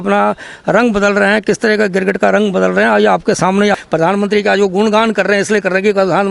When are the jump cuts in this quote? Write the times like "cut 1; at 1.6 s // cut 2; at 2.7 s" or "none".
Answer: cut 1; at 3.8 s